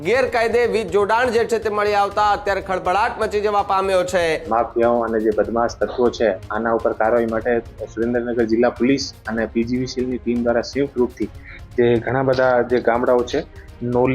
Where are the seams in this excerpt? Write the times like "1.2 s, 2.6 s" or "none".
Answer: 4.5 s